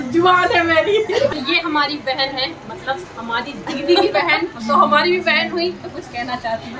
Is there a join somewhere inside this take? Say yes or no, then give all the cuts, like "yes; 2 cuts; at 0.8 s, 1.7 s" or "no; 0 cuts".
yes; 1 cut; at 1.3 s